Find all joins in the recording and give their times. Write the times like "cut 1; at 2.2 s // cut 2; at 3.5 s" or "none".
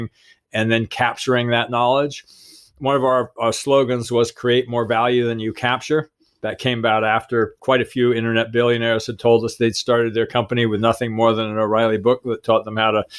cut 1; at 0.9 s // cut 2; at 3.3 s // cut 3; at 7.6 s